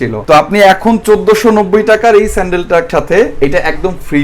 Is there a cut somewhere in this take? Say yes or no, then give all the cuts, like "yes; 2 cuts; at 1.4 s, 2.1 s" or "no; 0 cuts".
yes; 1 cut; at 2.9 s